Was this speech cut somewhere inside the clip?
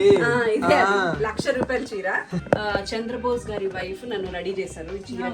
yes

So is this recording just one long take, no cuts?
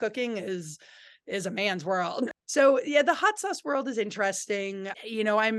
no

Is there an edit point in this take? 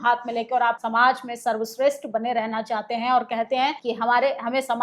yes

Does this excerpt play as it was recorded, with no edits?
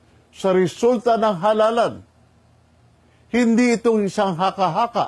yes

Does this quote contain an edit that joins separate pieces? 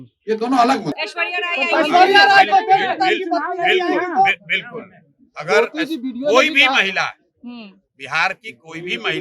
yes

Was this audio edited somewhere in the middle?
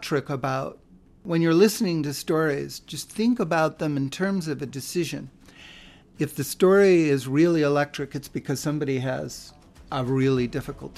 yes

